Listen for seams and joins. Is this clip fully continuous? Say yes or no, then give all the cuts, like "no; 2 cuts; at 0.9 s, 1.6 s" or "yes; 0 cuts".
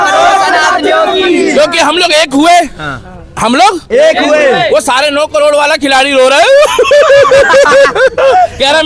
yes; 0 cuts